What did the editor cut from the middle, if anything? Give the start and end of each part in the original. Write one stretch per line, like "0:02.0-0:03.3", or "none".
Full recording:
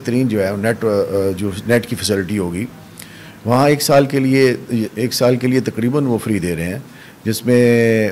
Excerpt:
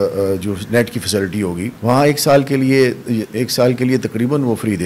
0:02.7-0:03.4